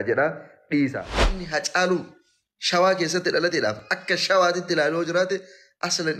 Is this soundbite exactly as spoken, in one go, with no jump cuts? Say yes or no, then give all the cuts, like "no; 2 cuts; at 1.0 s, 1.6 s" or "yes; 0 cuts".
no; 1 cut; at 1.4 s